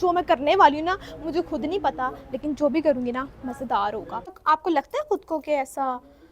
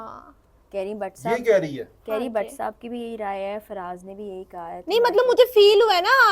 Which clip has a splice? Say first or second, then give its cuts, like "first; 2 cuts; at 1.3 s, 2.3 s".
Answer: first; 1 cut; at 4.4 s